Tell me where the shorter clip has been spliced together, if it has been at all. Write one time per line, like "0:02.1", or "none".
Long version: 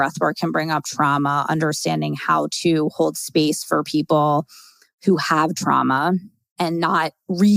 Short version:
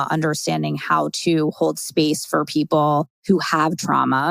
0:03.1